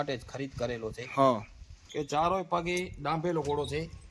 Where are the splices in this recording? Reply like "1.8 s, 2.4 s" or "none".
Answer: 1.8 s